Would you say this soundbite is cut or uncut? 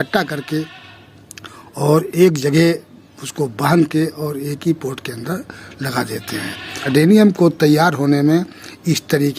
cut